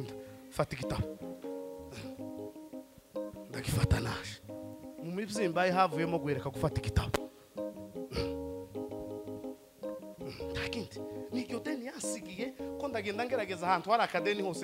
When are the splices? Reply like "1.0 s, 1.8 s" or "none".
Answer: none